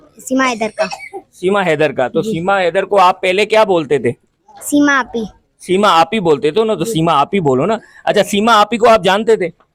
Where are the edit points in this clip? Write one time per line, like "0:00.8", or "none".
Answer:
none